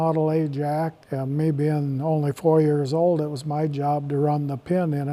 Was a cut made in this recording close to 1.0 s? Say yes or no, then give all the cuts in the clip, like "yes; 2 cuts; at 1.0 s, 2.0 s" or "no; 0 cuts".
yes; 1 cut; at 1.0 s